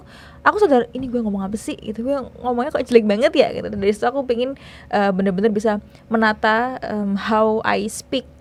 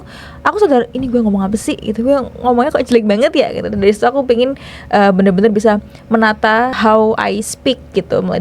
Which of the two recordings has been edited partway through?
second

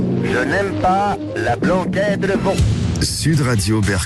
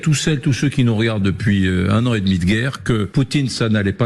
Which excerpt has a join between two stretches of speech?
second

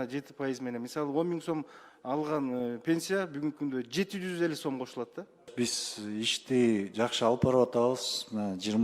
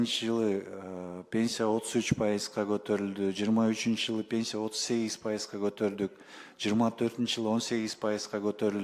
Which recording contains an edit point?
first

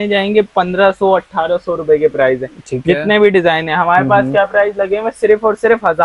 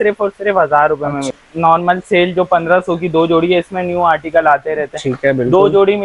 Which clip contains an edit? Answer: second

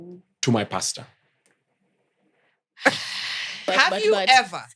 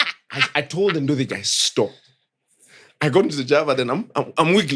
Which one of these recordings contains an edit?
first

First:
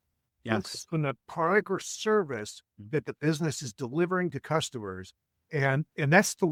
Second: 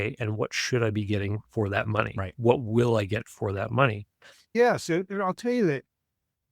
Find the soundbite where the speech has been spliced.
second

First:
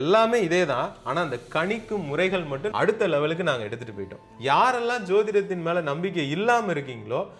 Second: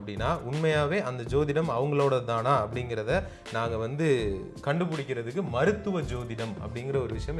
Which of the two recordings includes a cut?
first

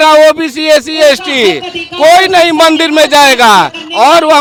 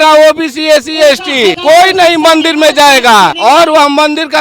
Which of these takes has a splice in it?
second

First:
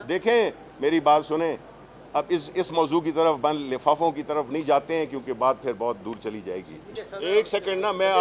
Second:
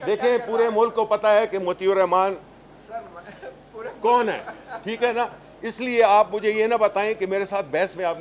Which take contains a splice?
first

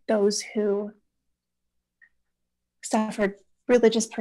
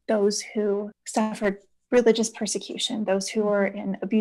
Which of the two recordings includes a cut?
second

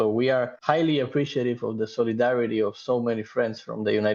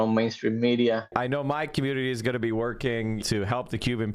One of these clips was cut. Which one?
second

